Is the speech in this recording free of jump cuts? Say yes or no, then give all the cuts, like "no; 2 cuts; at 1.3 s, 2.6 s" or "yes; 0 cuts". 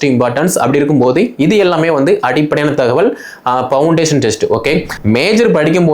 no; 1 cut; at 4.9 s